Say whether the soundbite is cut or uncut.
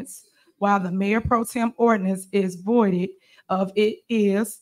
uncut